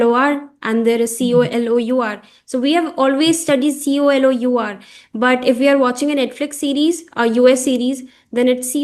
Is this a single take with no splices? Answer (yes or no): yes